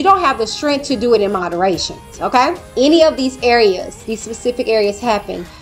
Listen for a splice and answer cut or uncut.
cut